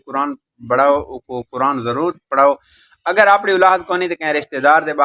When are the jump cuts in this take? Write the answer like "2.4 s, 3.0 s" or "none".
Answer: none